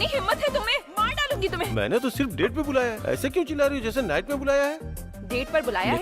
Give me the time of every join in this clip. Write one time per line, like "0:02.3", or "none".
0:02.0